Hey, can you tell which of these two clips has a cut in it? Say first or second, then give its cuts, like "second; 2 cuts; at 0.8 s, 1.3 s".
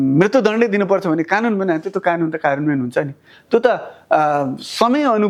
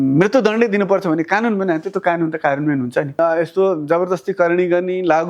second; 1 cut; at 3.2 s